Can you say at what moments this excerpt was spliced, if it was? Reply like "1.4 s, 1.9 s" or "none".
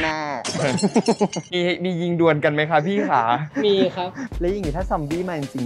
4.2 s